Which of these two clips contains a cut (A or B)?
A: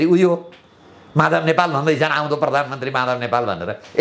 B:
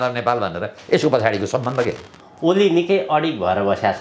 B